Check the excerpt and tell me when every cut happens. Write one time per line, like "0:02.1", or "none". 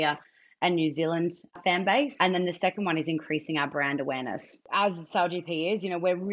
0:01.6
0:04.5